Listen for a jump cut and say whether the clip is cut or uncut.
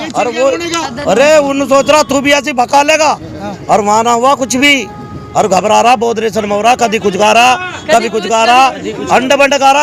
uncut